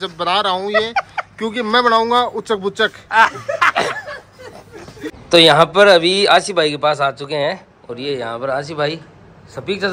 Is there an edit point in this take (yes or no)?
yes